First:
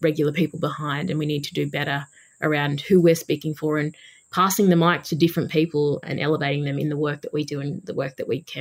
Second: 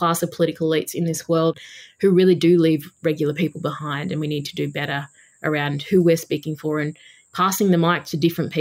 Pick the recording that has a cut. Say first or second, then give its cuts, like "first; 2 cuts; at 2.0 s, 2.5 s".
second; 1 cut; at 1.6 s